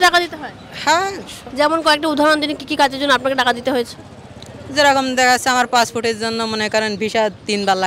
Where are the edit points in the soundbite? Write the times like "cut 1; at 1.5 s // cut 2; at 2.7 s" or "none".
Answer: none